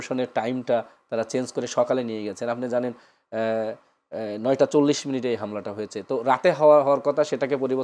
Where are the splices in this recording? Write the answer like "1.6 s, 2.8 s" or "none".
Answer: none